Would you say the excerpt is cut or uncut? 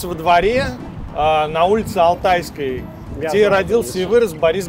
uncut